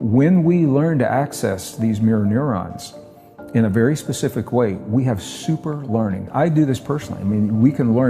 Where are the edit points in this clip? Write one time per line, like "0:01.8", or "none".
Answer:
0:06.3